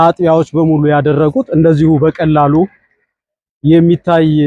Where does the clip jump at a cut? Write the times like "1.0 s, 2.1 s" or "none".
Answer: none